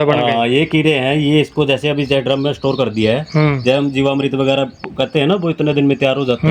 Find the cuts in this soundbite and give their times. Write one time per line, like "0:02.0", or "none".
none